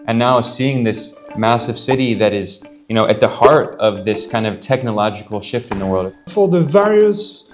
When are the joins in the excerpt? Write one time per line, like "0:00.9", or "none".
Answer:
0:06.3